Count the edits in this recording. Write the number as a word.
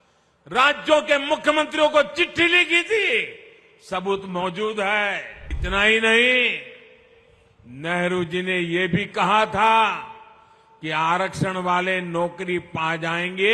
one